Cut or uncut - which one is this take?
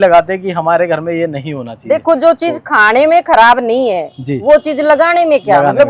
uncut